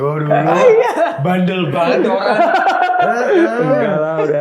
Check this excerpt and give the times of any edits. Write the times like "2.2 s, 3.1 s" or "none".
none